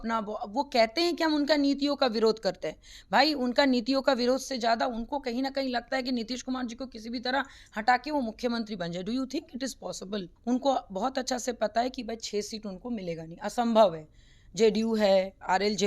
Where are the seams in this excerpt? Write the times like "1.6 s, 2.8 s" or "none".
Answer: 10.3 s